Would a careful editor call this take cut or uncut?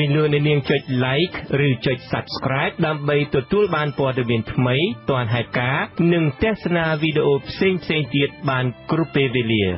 cut